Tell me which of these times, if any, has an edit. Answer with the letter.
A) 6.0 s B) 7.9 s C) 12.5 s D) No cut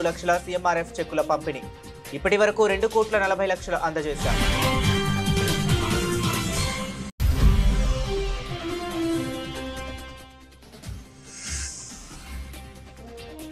C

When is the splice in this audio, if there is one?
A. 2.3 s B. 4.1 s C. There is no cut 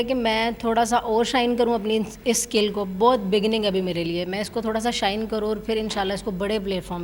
C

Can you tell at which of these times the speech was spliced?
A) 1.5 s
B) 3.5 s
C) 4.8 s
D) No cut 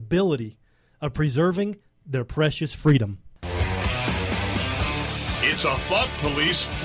B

